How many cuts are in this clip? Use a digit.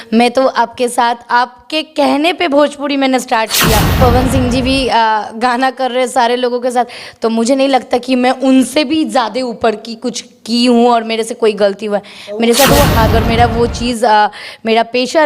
2